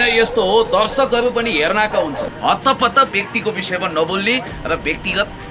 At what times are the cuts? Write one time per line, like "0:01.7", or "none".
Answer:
0:02.3